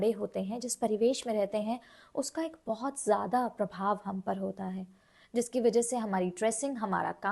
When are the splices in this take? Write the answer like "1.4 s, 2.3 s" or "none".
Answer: none